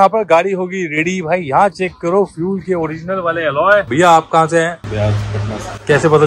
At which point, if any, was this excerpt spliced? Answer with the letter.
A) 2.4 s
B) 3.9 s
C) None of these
B